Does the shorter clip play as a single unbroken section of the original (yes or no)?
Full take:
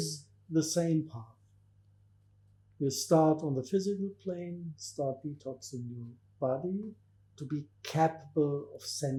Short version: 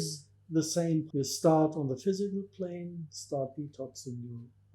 no